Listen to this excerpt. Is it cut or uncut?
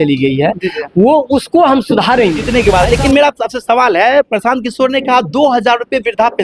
cut